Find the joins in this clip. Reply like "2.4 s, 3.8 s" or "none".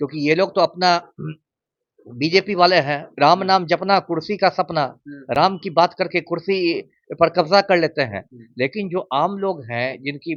none